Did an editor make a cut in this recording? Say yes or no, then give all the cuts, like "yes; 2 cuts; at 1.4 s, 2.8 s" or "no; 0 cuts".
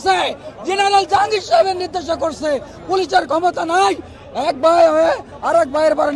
no; 0 cuts